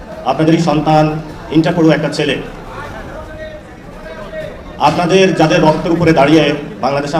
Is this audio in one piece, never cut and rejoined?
yes; 0 cuts

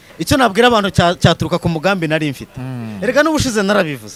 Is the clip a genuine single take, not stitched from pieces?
yes; 0 cuts

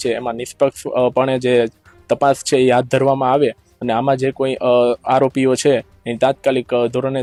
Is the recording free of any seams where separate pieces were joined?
yes; 0 cuts

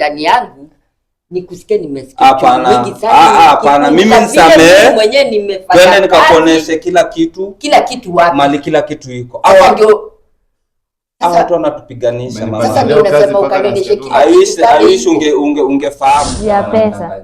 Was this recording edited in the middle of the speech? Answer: yes; 1 cut; at 16.3 s

